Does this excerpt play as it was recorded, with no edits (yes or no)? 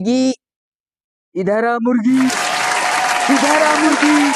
yes